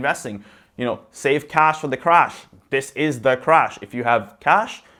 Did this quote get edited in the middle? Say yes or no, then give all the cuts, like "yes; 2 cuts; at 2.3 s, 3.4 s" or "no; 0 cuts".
no; 0 cuts